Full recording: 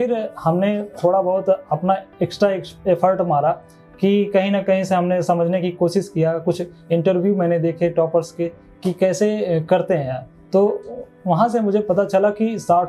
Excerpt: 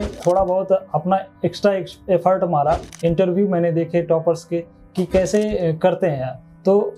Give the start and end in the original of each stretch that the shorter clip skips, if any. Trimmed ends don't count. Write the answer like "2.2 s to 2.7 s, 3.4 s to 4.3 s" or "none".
3.7 s to 6.8 s

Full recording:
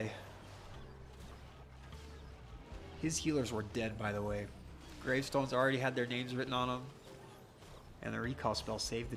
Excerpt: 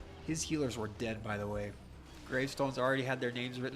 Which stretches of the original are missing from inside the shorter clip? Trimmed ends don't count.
none

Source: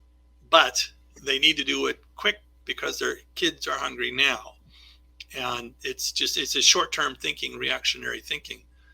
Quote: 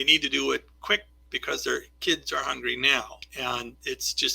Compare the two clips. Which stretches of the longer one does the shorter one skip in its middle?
4.6 s to 5.2 s

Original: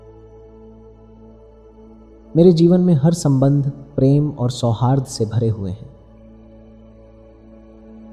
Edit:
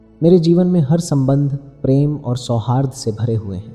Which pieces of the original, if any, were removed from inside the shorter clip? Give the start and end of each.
none

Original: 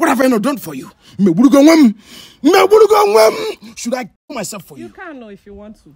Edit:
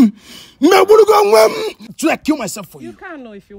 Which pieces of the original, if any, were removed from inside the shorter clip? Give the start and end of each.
3.9 s to 4.0 s

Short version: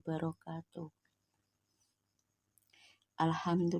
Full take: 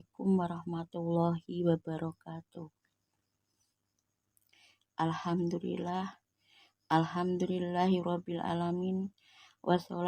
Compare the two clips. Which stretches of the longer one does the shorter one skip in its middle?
none

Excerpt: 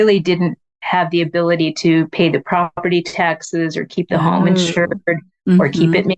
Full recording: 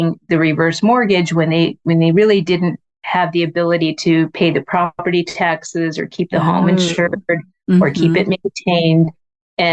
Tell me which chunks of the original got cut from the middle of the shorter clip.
none

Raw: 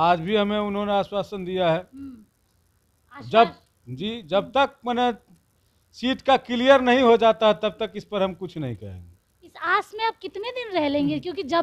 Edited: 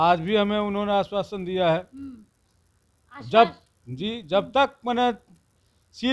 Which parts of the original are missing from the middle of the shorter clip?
none

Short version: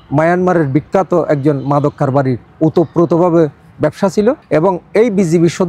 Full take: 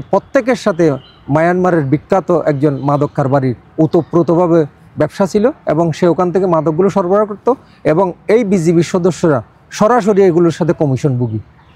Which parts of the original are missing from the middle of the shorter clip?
5.6 s to 7.7 s

